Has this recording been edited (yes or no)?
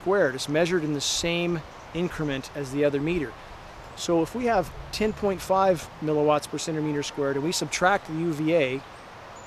no